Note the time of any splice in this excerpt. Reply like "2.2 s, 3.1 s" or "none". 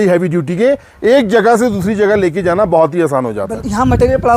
3.4 s